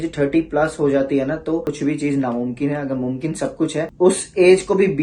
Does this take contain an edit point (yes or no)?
yes